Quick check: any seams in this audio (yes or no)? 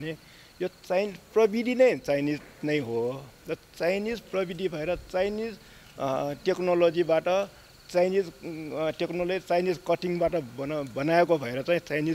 no